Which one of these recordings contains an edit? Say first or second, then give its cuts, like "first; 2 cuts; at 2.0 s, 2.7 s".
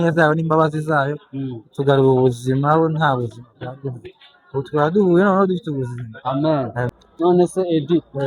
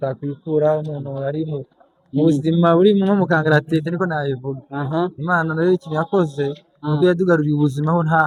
first; 1 cut; at 6.9 s